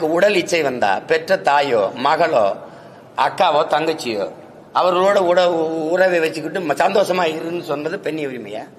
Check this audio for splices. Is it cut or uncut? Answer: uncut